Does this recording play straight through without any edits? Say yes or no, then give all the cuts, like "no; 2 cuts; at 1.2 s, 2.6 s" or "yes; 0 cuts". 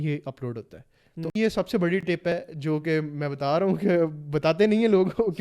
no; 1 cut; at 1.4 s